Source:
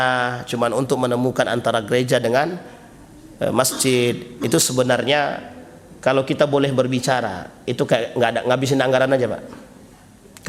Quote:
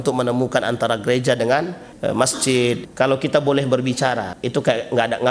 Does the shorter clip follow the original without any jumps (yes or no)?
no